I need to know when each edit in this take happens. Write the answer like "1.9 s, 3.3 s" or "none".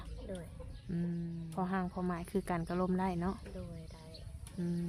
1.4 s

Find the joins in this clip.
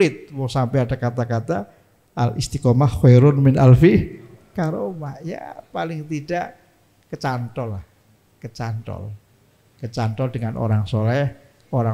none

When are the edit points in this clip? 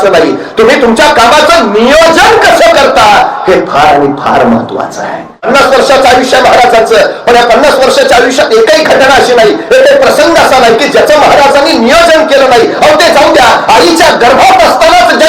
5.5 s

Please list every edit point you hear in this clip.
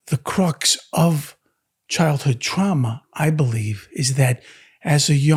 none

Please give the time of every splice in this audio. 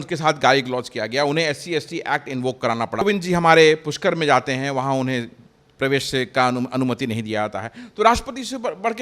3.0 s

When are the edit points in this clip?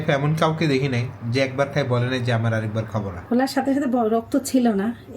3.1 s

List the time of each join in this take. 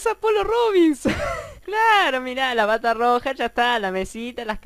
1.7 s

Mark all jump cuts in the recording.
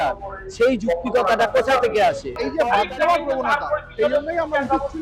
2.4 s

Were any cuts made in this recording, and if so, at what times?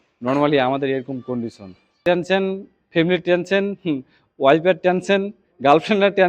2.0 s

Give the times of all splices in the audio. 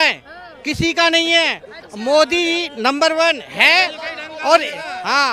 none

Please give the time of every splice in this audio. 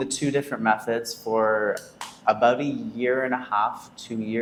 none

